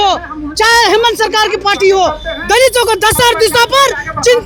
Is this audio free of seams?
yes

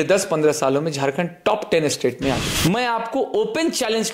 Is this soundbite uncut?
no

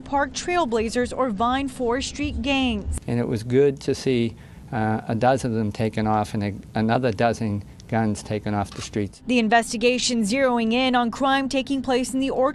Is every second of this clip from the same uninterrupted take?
yes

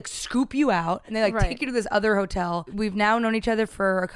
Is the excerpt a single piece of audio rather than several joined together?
no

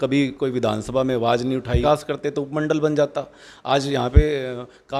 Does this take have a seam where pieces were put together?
yes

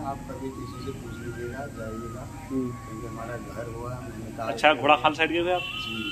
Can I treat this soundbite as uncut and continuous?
yes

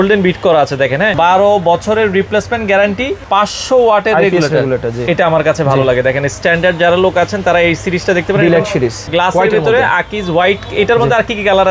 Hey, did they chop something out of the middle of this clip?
yes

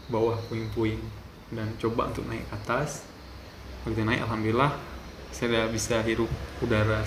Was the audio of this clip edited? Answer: no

